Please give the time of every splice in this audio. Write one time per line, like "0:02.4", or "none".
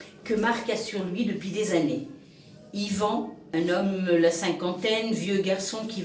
0:03.4